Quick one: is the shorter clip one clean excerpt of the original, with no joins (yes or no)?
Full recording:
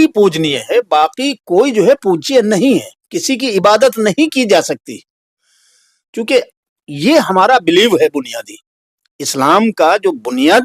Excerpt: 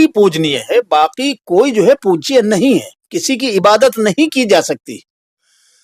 yes